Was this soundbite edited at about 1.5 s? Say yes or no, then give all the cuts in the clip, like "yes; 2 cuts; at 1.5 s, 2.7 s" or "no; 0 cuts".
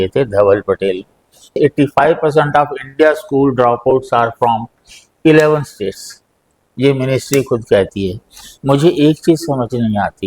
yes; 1 cut; at 1.5 s